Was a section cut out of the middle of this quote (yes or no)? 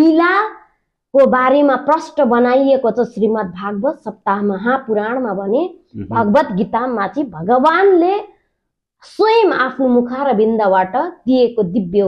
no